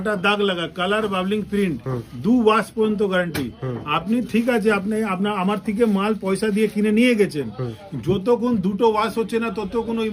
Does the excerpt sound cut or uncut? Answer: uncut